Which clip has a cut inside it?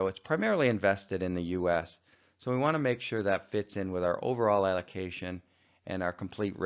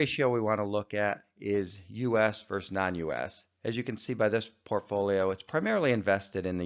first; 1 cut; at 2.8 s

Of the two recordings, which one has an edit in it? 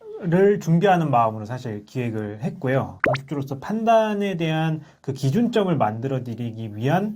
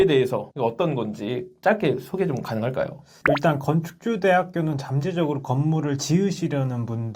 first; 1 cut; at 2.9 s

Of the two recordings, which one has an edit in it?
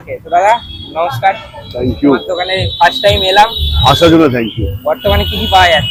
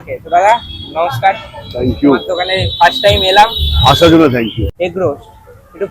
second; 1 cut; at 4.6 s

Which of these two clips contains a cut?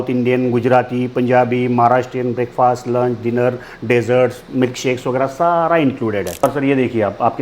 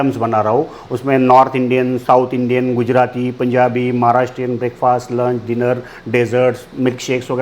first; 1 cut; at 6.4 s

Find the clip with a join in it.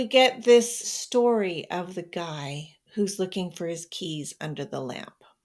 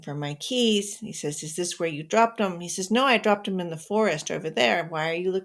first; 1 cut; at 0.9 s

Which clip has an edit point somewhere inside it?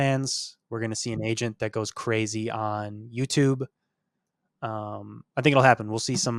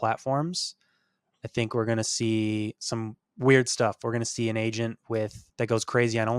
second; 1 cut; at 5.4 s

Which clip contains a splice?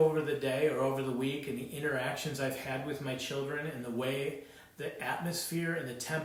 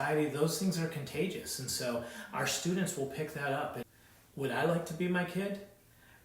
second; 1 cut; at 3.8 s

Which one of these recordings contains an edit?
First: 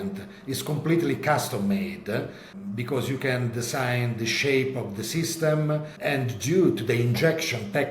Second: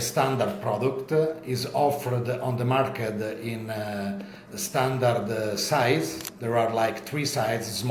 first; 1 cut; at 5.9 s

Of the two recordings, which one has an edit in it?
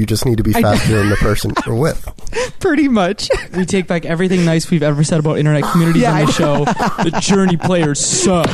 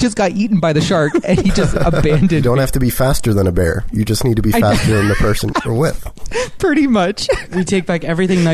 second; 1 cut; at 2.4 s

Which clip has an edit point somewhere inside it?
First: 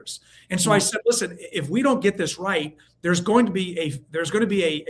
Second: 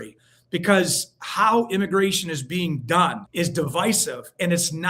second; 1 cut; at 3.2 s

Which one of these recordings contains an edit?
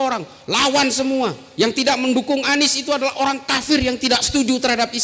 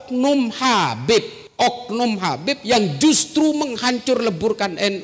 second; 1 cut; at 1.4 s

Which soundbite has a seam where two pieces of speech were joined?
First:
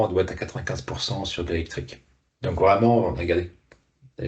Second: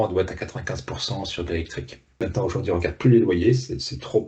second; 1 cut; at 2.2 s

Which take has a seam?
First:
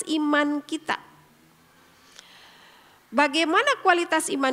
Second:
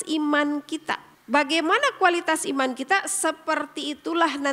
second; 1 cut; at 1.1 s

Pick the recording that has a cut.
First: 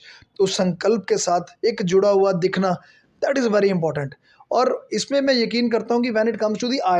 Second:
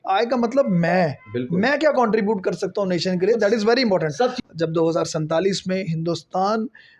second; 1 cut; at 4.4 s

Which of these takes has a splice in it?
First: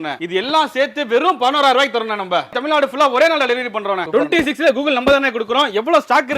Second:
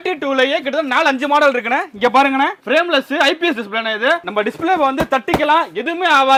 first; 2 cuts; at 2.6 s, 4.0 s

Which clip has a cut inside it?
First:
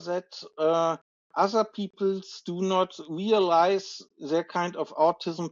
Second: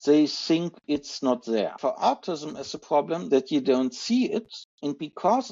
second; 3 cuts; at 1.8 s, 3.2 s, 4.6 s

